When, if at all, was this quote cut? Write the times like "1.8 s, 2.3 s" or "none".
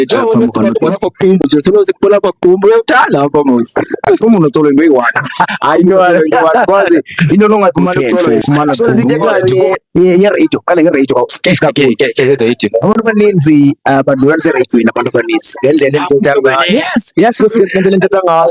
9.4 s